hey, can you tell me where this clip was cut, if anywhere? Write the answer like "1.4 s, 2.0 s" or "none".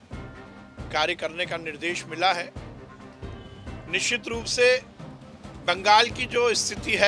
none